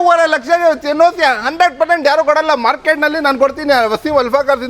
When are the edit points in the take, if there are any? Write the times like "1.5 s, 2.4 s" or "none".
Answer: none